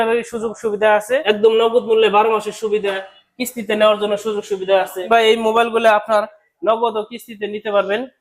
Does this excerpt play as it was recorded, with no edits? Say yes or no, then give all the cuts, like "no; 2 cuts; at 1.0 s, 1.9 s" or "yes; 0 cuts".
no; 2 cuts; at 1.2 s, 5.0 s